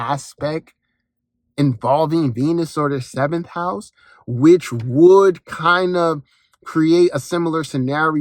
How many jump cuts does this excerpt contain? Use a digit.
0